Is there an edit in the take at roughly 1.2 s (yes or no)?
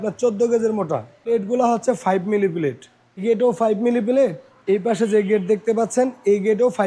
yes